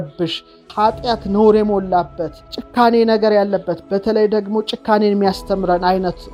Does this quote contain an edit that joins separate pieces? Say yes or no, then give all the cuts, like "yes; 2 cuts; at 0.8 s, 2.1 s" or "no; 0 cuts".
no; 0 cuts